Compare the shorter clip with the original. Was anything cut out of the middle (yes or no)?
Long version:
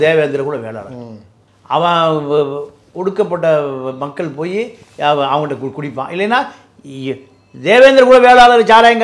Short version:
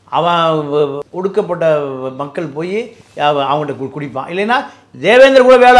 yes